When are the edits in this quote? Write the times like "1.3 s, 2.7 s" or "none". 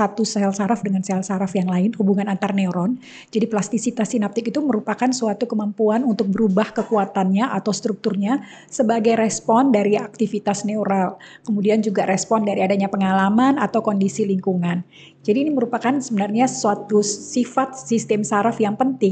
none